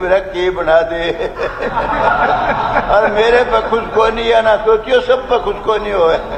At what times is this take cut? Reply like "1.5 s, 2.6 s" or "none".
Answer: none